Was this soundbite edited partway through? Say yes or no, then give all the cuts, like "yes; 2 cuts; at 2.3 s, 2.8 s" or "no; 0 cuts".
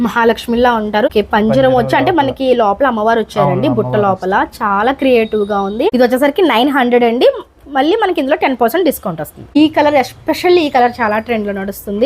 yes; 3 cuts; at 1.1 s, 5.9 s, 9.6 s